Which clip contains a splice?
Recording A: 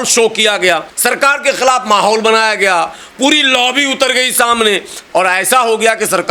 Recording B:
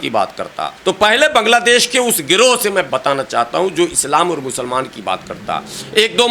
B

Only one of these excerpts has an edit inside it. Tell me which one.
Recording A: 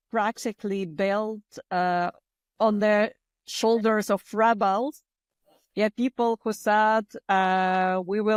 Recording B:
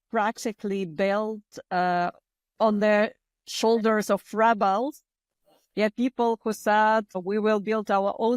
B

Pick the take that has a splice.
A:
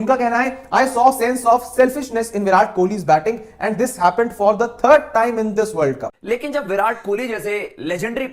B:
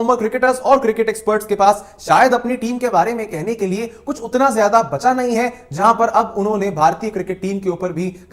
A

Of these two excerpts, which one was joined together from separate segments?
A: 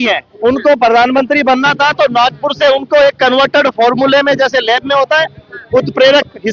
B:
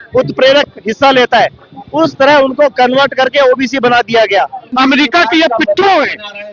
B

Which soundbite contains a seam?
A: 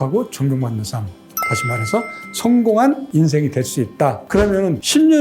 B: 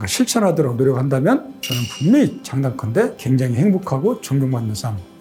A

